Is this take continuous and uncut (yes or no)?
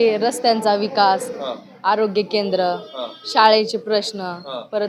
yes